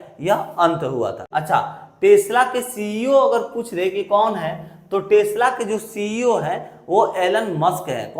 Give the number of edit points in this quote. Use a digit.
1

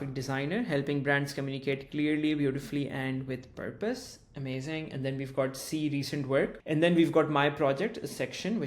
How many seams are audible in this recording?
1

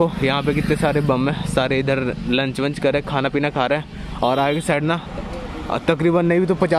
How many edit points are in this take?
0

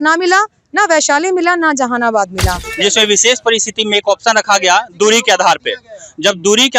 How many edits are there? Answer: 1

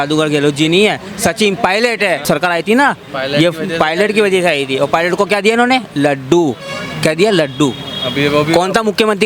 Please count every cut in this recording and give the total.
1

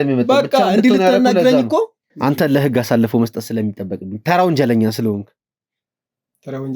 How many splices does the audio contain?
1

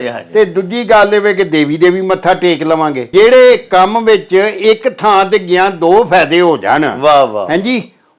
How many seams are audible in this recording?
1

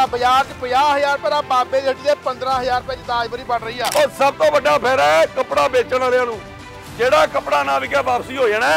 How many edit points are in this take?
1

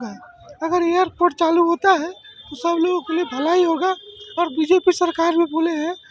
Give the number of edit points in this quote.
0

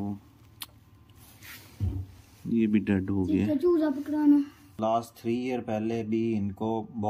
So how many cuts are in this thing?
1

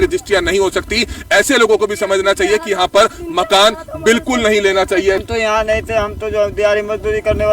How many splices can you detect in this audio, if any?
1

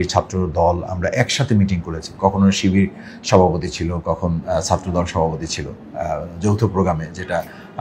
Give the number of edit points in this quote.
0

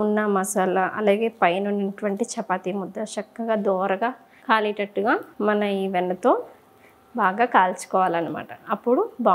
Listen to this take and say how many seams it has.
0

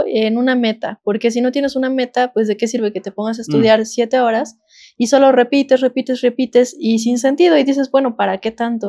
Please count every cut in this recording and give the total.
0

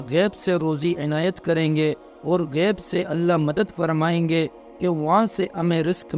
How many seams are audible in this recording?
0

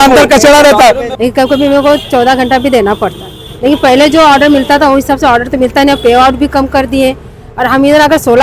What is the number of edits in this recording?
1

